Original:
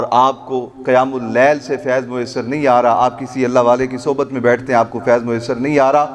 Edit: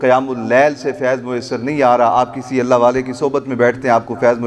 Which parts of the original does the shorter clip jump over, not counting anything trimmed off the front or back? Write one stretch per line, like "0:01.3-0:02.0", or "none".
none